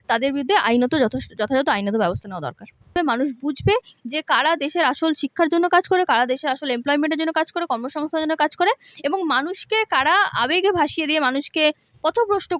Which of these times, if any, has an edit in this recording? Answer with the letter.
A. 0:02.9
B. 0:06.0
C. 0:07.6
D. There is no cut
A